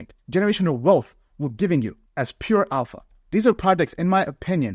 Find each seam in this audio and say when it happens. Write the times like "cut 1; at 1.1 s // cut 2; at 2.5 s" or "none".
cut 1; at 3.1 s

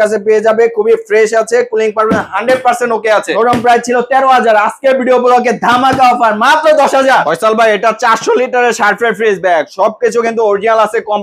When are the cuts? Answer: cut 1; at 3.3 s // cut 2; at 7.1 s

